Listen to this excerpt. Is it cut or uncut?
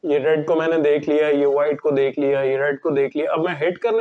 uncut